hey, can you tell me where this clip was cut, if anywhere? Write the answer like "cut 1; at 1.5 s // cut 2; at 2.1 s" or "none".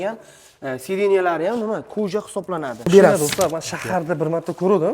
cut 1; at 2.9 s

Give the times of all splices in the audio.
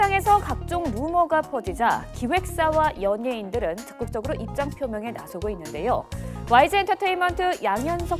cut 1; at 3.6 s

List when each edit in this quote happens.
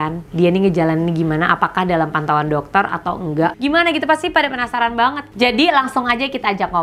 cut 1; at 3.5 s

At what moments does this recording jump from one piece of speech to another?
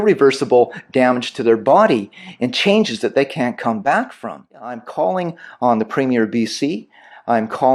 cut 1; at 4.8 s

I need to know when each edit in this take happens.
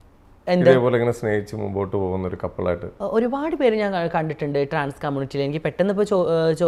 none

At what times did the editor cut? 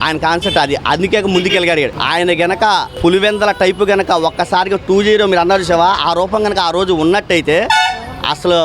cut 1; at 2.0 s // cut 2; at 2.9 s

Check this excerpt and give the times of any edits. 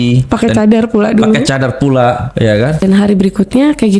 cut 1; at 2.8 s

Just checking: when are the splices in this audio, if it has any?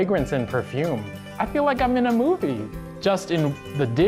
none

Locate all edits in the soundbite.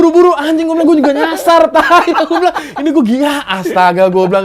none

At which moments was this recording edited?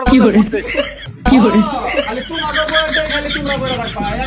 cut 1; at 1.0 s

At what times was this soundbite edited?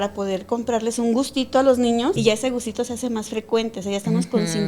cut 1; at 2.2 s

